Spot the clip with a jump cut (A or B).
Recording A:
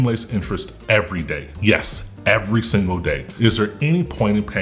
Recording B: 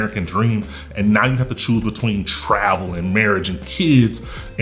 A